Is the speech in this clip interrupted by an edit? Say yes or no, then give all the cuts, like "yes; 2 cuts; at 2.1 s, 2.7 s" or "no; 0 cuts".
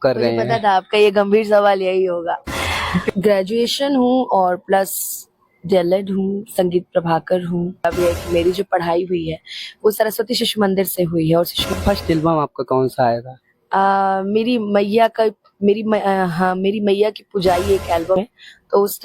yes; 4 cuts; at 3.0 s, 7.8 s, 11.6 s, 18.2 s